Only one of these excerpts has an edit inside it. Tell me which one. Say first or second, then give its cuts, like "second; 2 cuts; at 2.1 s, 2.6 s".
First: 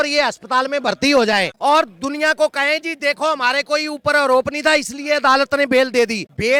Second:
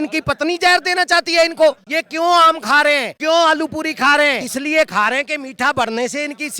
second; 1 cut; at 4.4 s